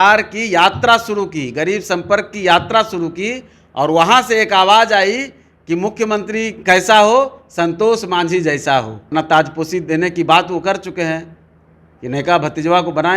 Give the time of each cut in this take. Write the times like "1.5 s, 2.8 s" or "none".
9.1 s